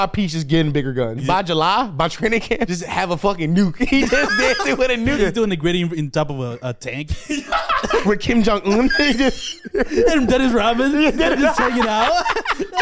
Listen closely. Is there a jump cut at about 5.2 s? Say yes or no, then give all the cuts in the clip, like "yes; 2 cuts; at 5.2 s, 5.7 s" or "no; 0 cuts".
yes; 4 cuts; at 1.2 s, 2.7 s, 5.2 s, 8.0 s